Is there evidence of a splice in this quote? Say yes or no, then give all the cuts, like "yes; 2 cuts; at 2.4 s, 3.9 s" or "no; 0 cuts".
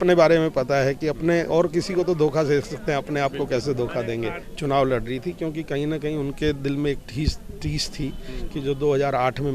yes; 1 cut; at 4.5 s